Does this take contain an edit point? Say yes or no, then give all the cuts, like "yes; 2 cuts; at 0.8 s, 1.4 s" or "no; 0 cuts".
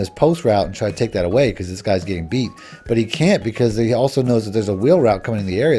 no; 0 cuts